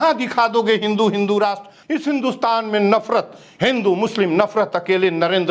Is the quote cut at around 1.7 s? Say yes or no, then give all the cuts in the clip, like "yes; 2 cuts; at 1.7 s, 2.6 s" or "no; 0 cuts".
yes; 1 cut; at 1.7 s